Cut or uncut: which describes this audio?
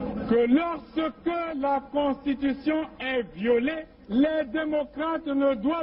uncut